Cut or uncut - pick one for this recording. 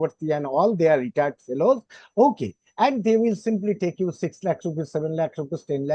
uncut